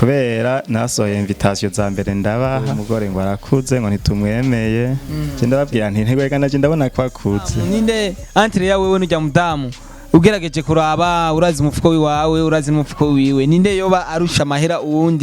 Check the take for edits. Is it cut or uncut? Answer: cut